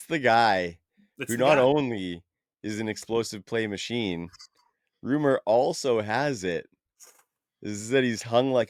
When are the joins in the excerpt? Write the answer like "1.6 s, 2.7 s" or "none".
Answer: none